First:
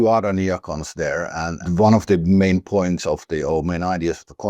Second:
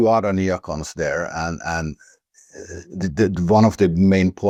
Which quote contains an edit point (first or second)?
first